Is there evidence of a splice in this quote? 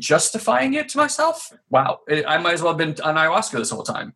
yes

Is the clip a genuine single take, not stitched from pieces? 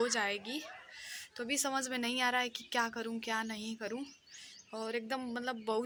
yes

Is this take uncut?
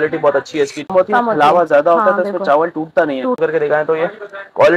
no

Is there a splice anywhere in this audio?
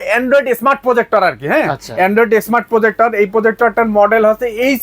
no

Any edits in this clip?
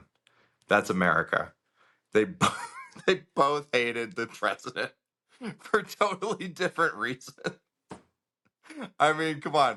no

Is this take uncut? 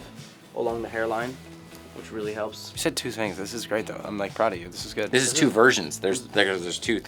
yes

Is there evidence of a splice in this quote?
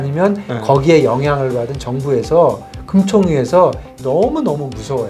yes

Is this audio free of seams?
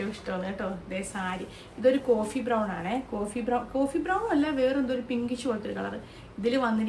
yes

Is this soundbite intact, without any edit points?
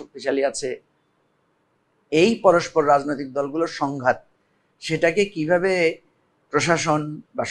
yes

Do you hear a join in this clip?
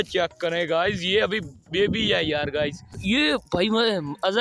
yes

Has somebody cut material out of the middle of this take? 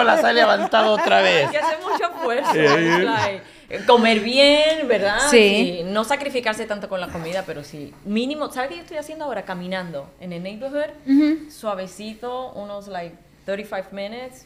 no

